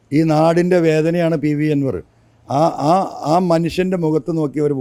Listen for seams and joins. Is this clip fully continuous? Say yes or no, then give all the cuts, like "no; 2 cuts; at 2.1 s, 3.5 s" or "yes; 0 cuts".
yes; 0 cuts